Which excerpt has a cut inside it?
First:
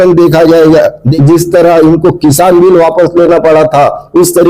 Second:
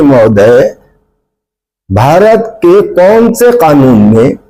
first; 1 cut; at 1.0 s

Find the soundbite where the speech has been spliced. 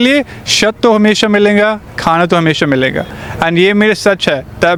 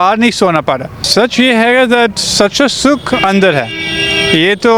second; 1 cut; at 1.0 s

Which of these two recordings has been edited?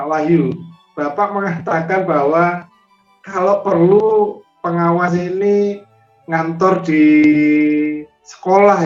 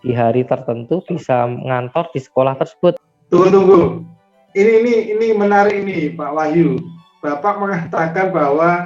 second; 2 cuts; at 3.1 s, 4.4 s

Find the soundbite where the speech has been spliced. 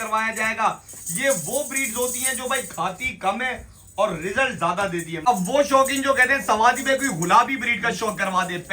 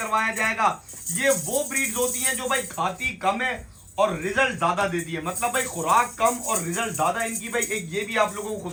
first; 1 cut; at 5.1 s

